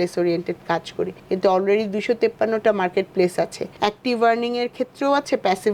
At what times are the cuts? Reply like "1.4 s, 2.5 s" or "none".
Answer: none